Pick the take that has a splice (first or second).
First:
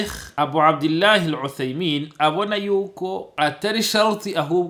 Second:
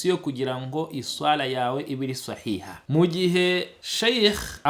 second